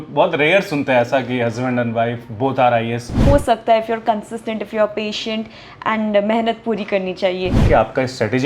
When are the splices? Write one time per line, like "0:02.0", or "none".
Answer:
0:03.2
0:07.6